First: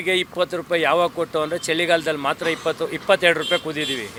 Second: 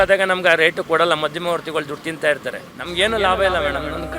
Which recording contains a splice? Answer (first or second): second